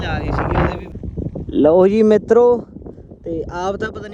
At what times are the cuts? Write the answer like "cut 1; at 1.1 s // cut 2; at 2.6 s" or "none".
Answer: cut 1; at 1.0 s

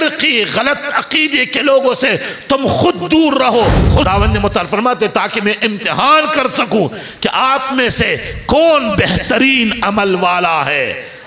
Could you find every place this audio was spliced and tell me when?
cut 1; at 4.1 s

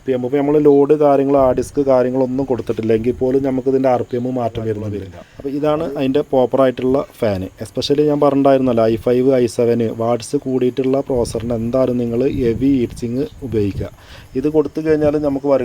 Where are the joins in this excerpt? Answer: cut 1; at 5.3 s

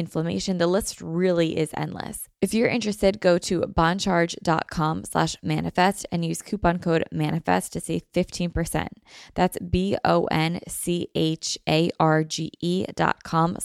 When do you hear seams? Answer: cut 1; at 2.2 s

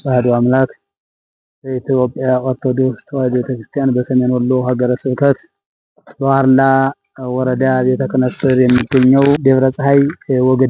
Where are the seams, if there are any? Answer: cut 1; at 9.4 s

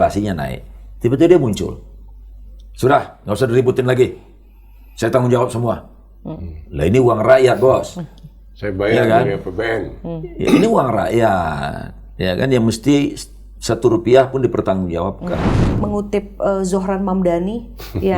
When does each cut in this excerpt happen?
cut 1; at 15.8 s

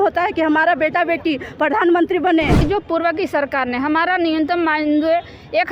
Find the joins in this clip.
cut 1; at 2.6 s

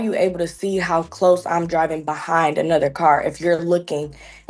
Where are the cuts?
none

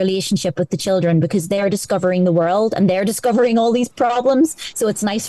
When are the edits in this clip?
none

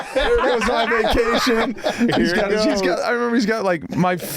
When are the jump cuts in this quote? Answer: none

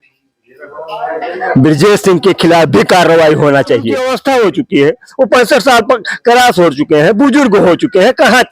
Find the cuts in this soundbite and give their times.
cut 1; at 4.1 s

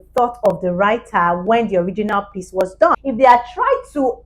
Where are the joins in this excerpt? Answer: cut 1; at 3.0 s

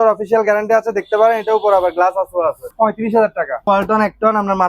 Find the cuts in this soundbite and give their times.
cut 1; at 2.7 s // cut 2; at 3.7 s

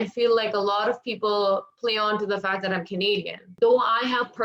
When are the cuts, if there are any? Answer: cut 1; at 3.4 s

